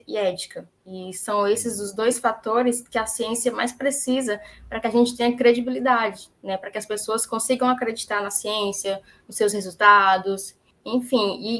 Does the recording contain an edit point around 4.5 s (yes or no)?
no